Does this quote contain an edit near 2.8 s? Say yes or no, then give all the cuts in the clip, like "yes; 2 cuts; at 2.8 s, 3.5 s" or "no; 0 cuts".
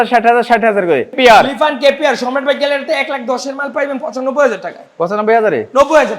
no; 1 cut; at 1.2 s